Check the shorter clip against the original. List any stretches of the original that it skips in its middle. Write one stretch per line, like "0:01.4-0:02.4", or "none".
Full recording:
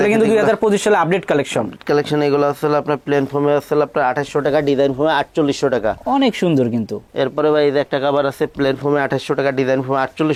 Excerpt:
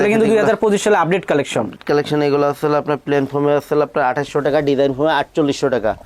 none